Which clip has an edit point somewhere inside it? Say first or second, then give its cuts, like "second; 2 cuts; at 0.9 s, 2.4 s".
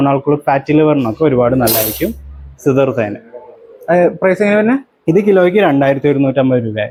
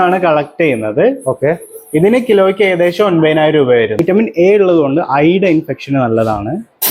second; 1 cut; at 3.9 s